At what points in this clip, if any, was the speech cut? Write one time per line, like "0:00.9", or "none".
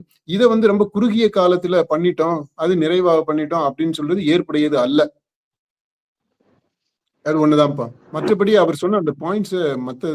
none